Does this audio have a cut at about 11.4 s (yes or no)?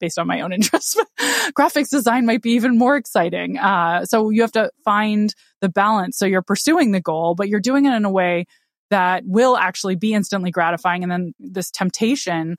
yes